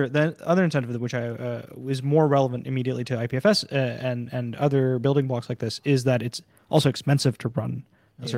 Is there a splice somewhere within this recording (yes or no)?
no